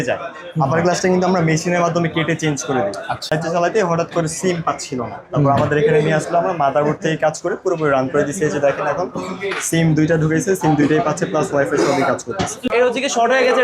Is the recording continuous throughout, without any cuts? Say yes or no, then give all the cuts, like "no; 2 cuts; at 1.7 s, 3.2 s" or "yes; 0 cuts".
no; 2 cuts; at 3.3 s, 12.7 s